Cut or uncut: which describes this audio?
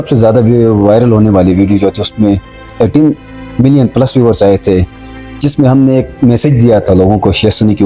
uncut